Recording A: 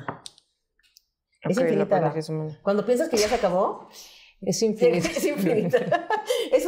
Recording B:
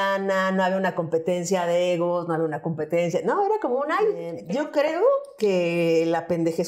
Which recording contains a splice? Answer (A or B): B